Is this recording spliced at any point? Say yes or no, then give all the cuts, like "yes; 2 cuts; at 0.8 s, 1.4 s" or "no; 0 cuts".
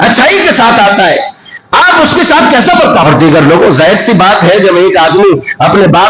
yes; 1 cut; at 3.0 s